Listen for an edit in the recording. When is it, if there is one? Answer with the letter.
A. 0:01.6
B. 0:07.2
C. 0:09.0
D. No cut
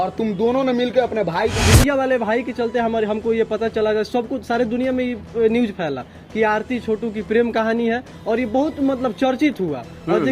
A